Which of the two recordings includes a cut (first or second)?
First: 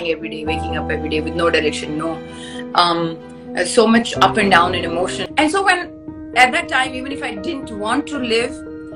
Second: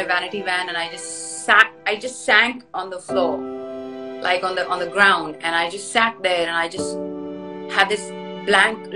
first